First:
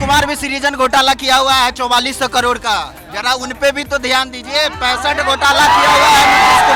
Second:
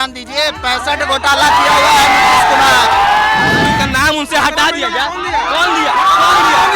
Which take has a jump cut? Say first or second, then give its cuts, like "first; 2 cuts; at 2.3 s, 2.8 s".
second; 1 cut; at 3.8 s